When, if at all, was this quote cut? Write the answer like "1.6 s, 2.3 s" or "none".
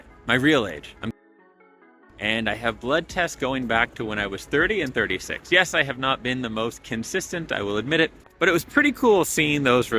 8.3 s